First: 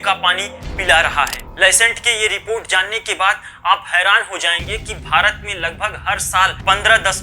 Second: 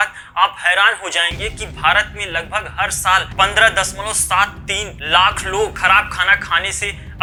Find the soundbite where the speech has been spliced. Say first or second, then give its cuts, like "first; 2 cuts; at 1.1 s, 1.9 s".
first; 1 cut; at 1.4 s